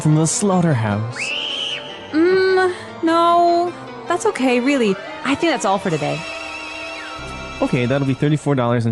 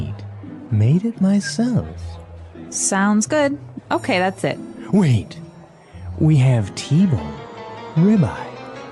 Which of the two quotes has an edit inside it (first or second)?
first